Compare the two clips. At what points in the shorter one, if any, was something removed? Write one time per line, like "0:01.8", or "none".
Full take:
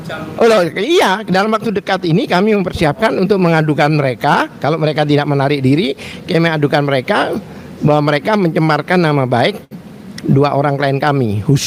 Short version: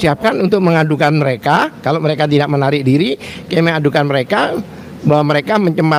none